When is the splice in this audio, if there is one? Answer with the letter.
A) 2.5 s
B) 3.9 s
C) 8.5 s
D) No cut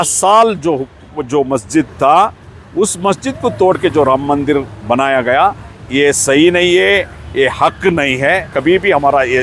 C